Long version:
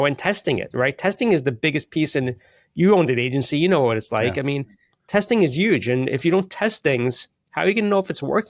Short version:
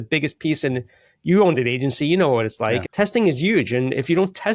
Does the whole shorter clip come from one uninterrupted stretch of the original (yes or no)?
no